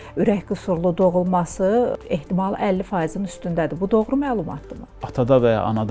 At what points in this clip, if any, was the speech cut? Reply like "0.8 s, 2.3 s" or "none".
1.9 s, 5.0 s

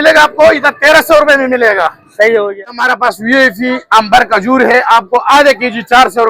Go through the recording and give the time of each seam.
2.6 s

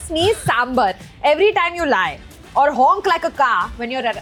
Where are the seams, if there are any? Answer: none

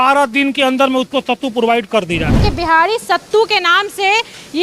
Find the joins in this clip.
2.3 s

